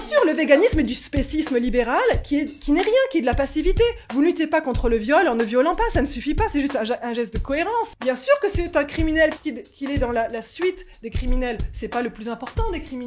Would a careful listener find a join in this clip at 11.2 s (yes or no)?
no